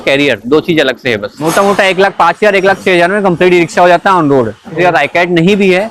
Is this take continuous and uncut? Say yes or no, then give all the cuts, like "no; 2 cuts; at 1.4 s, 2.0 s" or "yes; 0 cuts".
no; 2 cuts; at 1.4 s, 4.8 s